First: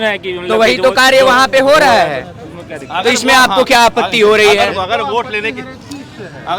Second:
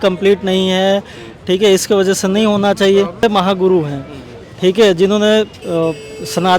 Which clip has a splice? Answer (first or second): second